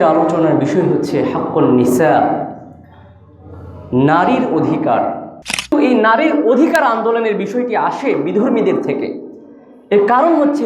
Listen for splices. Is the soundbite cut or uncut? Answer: cut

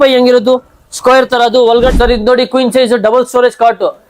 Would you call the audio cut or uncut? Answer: cut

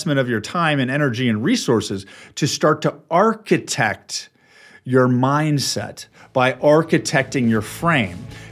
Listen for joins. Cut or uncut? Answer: uncut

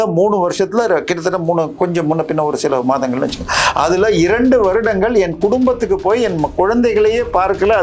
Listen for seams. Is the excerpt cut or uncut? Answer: uncut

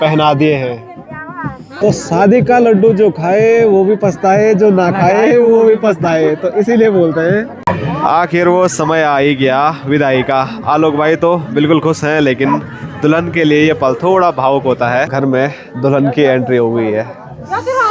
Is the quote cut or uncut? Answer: cut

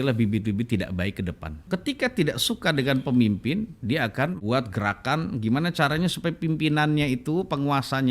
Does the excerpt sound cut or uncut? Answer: cut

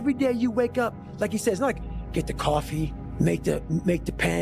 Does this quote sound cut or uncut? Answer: cut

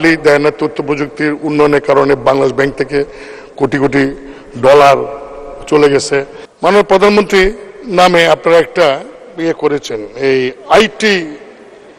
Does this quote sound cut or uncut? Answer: cut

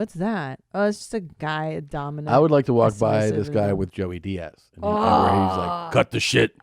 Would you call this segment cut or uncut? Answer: uncut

